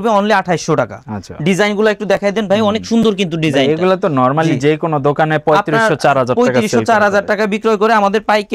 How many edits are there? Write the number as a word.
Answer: zero